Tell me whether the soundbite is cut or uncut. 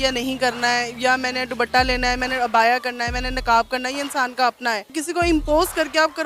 cut